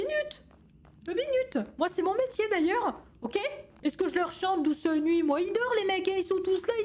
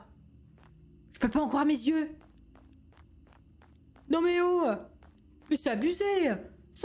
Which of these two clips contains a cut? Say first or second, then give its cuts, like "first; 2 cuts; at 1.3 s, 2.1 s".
first; 1 cut; at 3.7 s